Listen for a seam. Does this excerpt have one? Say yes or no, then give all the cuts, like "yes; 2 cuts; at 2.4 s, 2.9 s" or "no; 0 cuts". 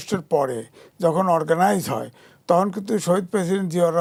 no; 0 cuts